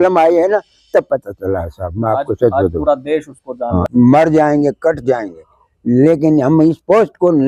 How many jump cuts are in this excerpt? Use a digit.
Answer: 1